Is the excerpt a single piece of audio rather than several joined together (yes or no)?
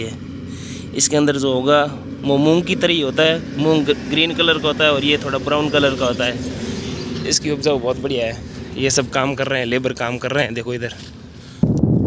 yes